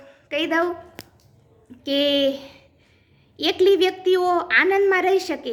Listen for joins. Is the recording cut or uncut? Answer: uncut